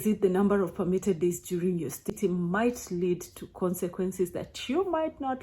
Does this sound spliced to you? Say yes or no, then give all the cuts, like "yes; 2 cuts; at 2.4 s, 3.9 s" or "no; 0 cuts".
yes; 1 cut; at 2.1 s